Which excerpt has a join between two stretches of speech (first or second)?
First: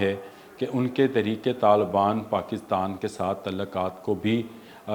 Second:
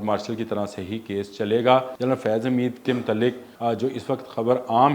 second